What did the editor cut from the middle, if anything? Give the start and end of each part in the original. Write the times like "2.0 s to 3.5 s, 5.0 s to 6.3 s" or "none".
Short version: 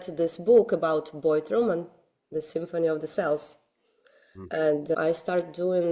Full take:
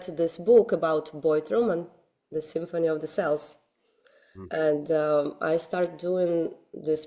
4.9 s to 5.4 s